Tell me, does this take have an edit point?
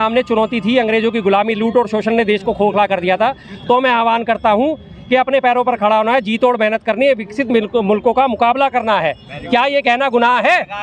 no; 0 cuts

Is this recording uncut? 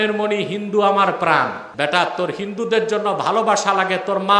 no; 1 cut; at 1.6 s

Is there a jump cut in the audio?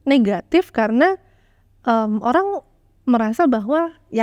no; 0 cuts

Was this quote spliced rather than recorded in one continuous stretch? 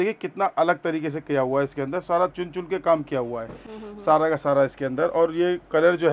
no; 0 cuts

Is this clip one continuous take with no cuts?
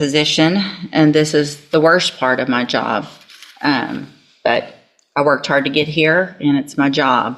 yes; 0 cuts

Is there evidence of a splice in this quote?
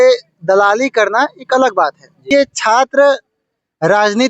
yes; 1 cut; at 2.3 s

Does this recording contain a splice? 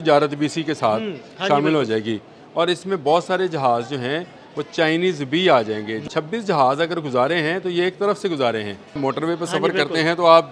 yes; 2 cuts; at 6.0 s, 9.0 s

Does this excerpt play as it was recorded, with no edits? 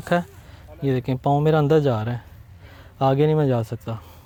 yes; 0 cuts

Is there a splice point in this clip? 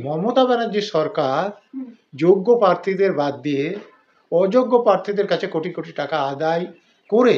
no; 0 cuts

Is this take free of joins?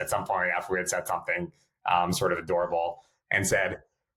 yes; 0 cuts

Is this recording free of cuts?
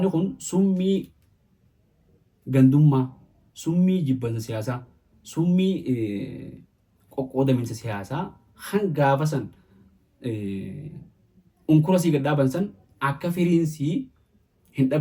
yes; 0 cuts

